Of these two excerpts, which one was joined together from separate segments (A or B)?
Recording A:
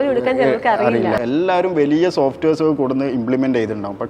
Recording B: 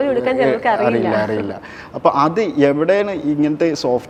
A